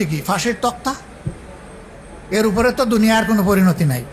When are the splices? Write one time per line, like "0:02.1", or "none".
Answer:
none